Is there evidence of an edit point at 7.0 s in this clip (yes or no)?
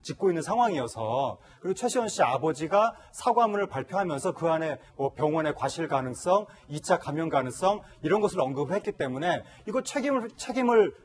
yes